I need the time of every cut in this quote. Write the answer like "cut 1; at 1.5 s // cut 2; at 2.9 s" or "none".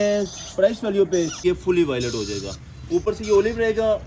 cut 1; at 1.4 s